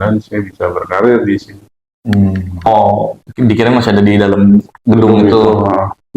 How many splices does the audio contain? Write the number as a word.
one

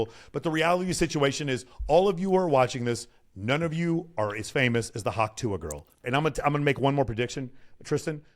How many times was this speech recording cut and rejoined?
one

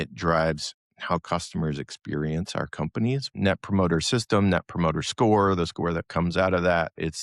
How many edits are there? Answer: one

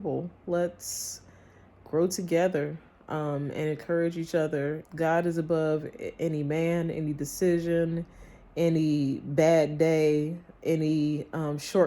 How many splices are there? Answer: one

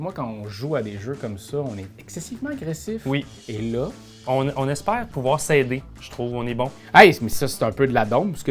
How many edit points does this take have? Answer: one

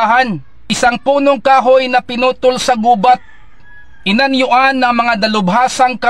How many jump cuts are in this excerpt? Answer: zero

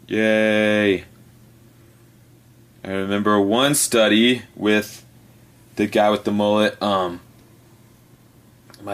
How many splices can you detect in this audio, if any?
one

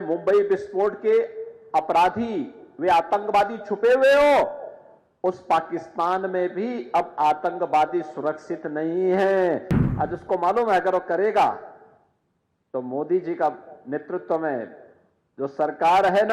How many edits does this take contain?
one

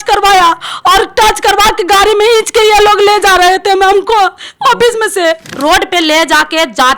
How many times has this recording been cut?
one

